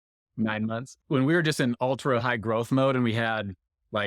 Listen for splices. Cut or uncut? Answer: cut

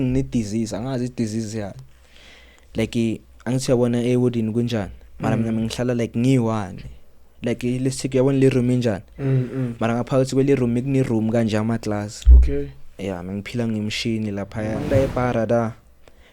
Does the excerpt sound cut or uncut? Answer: cut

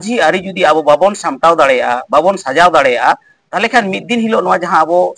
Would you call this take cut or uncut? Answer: uncut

